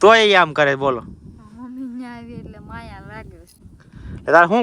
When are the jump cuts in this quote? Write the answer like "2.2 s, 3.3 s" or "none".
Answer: 3.7 s